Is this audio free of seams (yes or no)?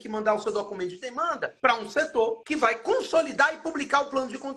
no